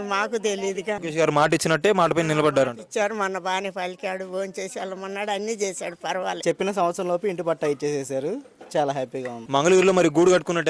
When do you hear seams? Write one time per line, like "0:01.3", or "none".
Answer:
0:01.0
0:06.4
0:09.4